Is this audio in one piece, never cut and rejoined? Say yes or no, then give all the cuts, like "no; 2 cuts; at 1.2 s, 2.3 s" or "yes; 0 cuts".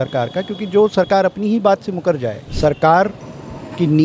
no; 1 cut; at 2.4 s